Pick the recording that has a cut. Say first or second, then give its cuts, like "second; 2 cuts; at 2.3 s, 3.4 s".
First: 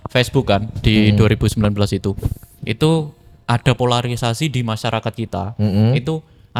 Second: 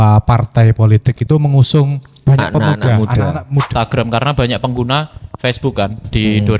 second; 1 cut; at 3.7 s